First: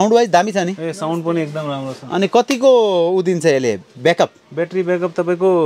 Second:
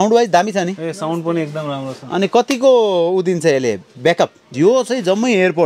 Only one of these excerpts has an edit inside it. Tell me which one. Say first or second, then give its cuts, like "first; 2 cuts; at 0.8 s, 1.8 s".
second; 1 cut; at 4.5 s